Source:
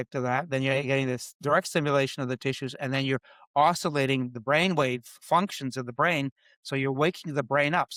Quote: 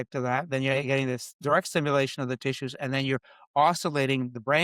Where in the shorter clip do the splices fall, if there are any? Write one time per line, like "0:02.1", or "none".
none